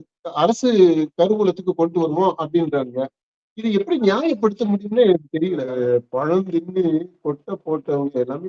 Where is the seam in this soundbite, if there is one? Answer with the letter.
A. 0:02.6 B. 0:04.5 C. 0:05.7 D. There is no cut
C